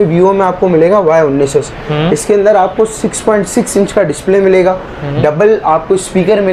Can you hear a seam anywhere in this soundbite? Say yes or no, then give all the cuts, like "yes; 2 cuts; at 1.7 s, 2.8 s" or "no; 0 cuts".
no; 0 cuts